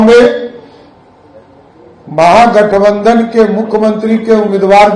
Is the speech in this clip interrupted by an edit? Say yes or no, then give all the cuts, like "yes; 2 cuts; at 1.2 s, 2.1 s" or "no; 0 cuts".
no; 0 cuts